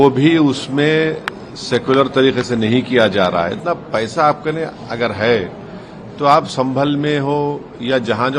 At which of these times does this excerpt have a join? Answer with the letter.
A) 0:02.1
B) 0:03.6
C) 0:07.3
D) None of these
B